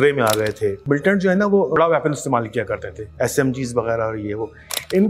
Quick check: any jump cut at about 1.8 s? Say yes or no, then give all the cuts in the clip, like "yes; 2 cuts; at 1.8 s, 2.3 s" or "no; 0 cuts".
yes; 3 cuts; at 0.8 s, 1.8 s, 3.0 s